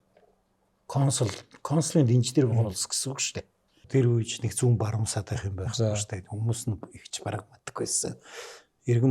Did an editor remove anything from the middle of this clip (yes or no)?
yes